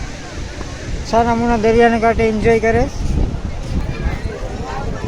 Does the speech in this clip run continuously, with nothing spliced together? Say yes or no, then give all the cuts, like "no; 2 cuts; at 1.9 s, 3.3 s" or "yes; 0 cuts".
no; 1 cut; at 3.8 s